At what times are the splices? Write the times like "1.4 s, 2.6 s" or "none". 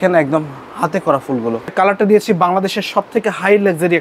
1.7 s